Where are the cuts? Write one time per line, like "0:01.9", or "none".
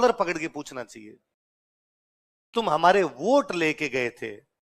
none